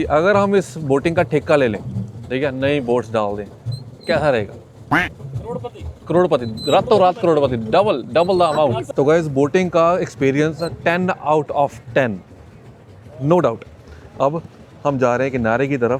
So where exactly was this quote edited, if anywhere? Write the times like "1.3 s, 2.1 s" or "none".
none